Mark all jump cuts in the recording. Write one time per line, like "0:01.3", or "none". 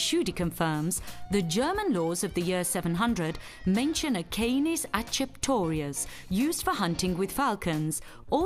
none